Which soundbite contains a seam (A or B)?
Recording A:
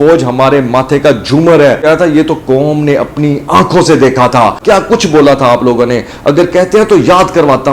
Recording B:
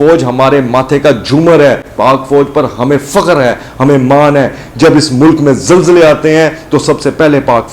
A